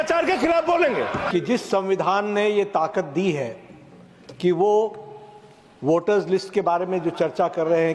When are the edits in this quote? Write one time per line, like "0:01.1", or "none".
0:01.2

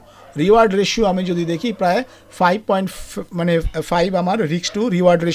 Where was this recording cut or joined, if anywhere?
none

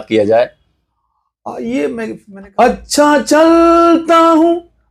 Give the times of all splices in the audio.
0:02.2

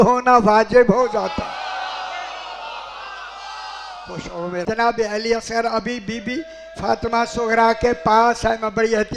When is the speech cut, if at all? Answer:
0:04.6

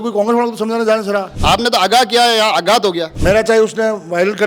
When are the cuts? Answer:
0:01.3
0:03.1

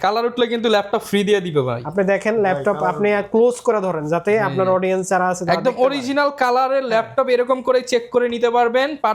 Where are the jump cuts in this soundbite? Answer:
none

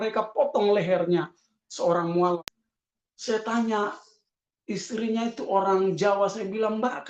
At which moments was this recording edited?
0:02.4

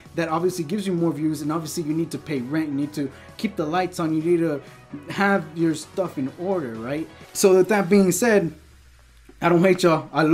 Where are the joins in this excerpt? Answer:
0:07.2

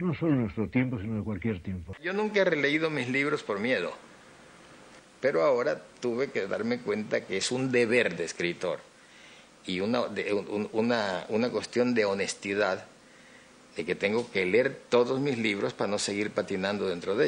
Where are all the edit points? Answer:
0:01.9

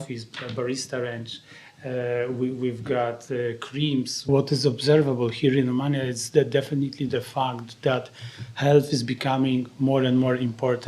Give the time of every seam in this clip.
0:04.2

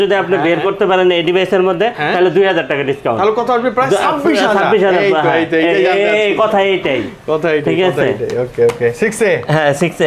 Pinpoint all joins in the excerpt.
none

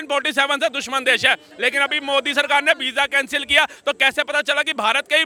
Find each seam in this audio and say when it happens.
none

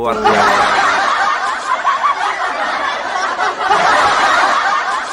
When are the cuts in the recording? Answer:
0:03.7

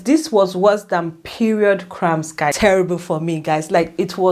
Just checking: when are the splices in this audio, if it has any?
0:02.6

